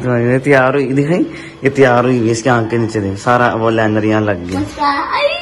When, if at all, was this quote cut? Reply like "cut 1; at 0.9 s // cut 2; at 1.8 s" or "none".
none